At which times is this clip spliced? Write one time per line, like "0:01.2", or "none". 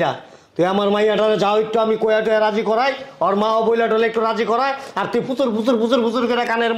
none